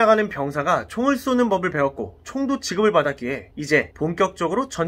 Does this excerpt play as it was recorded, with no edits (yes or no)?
no